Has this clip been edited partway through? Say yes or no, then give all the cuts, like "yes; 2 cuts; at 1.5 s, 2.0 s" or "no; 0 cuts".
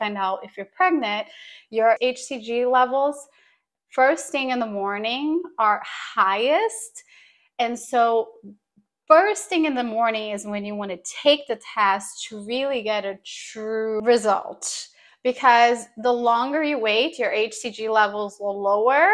no; 0 cuts